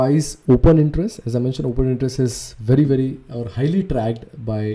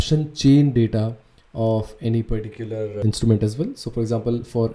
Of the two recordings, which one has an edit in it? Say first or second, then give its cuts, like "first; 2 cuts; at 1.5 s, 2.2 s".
second; 1 cut; at 3.0 s